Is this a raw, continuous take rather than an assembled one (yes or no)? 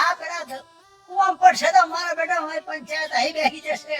yes